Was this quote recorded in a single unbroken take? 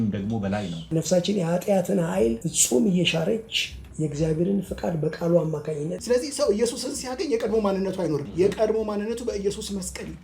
no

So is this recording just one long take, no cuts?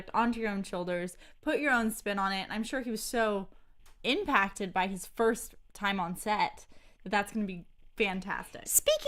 yes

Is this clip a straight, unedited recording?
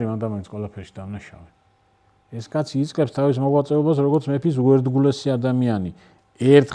yes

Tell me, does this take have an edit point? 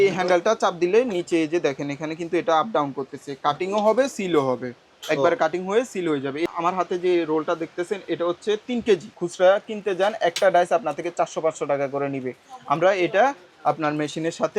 yes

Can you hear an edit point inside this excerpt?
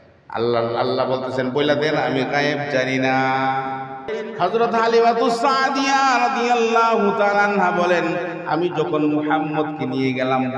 yes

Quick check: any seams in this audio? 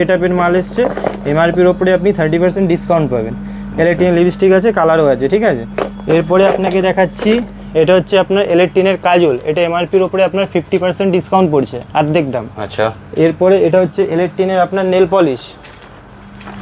no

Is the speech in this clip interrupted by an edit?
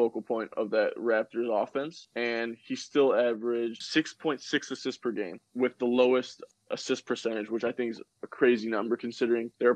no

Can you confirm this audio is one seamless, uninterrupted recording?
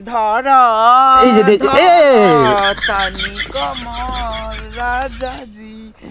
yes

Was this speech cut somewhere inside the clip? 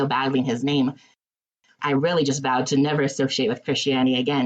yes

